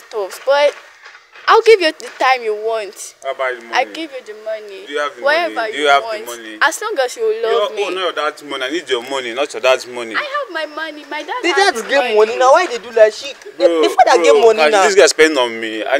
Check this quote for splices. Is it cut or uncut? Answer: uncut